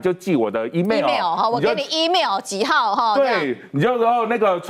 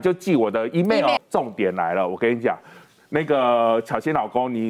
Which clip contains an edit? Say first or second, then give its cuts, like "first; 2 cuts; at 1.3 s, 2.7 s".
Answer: second; 1 cut; at 1.2 s